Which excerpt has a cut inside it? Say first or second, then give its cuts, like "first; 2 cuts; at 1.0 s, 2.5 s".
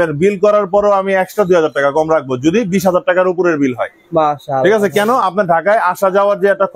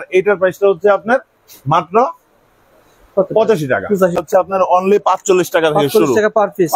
second; 1 cut; at 4.2 s